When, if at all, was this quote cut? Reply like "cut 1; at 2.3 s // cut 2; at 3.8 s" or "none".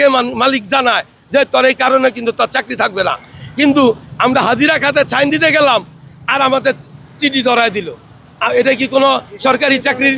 none